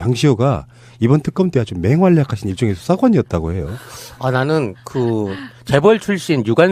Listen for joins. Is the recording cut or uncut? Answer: uncut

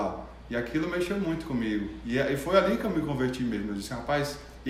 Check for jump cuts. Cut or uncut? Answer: uncut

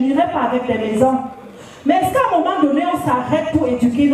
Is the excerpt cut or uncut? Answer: uncut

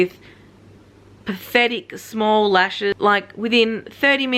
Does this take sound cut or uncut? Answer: cut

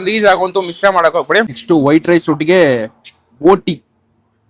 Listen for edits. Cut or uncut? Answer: cut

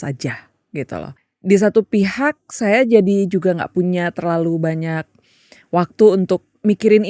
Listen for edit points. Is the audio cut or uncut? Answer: cut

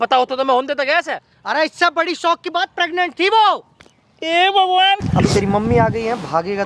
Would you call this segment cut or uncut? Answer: cut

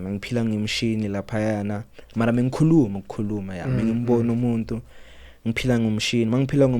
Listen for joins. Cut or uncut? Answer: uncut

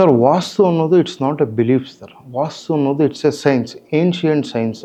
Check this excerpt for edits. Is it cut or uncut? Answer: uncut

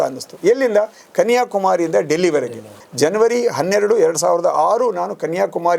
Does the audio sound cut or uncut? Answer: cut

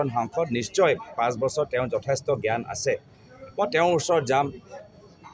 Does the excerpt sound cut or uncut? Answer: uncut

